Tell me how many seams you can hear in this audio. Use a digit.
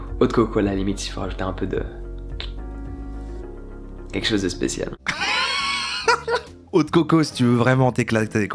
0